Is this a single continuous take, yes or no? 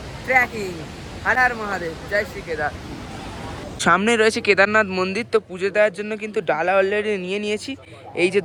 yes